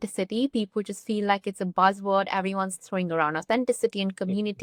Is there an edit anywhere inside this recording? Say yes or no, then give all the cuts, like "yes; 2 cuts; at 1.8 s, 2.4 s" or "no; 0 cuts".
no; 0 cuts